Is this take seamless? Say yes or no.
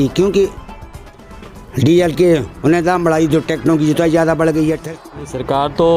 no